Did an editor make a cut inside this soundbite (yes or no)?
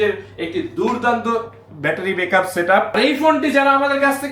yes